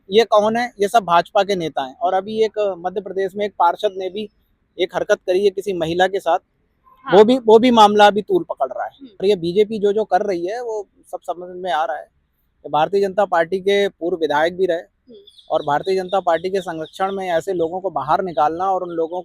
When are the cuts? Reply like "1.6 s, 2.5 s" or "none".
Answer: 9.2 s